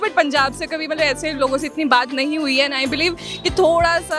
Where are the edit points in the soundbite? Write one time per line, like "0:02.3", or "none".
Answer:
none